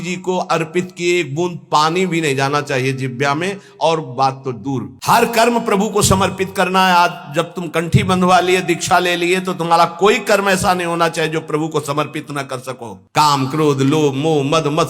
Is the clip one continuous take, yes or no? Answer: no